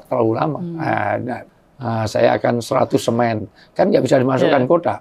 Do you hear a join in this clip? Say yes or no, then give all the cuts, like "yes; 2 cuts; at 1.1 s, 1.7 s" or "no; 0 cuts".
yes; 1 cut; at 1.4 s